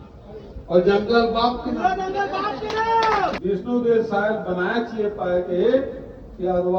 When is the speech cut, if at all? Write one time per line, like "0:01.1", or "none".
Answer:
0:03.4